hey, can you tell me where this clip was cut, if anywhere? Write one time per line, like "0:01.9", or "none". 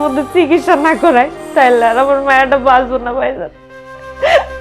none